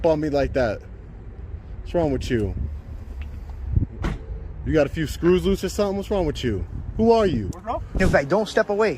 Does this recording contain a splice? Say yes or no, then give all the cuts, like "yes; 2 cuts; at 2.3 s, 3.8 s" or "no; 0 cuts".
yes; 1 cut; at 8.0 s